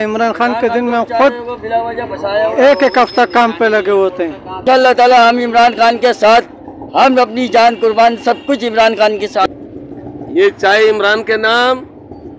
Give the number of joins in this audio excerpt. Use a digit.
2